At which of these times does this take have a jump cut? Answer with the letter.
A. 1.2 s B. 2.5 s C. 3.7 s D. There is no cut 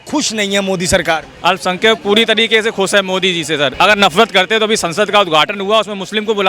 C